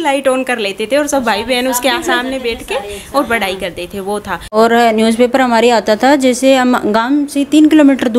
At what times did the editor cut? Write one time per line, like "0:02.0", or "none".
0:04.6